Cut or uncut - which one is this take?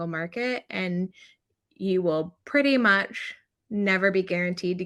uncut